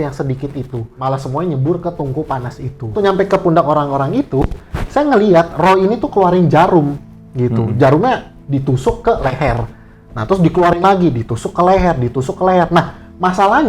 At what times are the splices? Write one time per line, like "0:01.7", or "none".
0:00.9
0:02.9